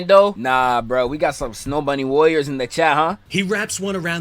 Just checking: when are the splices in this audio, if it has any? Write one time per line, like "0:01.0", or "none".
0:03.2